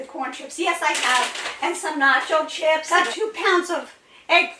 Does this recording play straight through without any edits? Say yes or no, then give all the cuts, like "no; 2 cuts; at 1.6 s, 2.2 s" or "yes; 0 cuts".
no; 1 cut; at 2.8 s